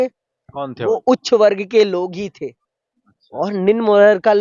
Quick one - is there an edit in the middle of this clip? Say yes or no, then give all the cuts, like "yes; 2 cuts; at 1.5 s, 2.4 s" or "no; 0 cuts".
no; 0 cuts